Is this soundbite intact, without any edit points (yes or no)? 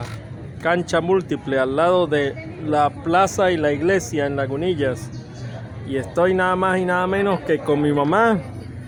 yes